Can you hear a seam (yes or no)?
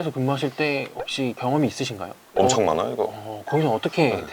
no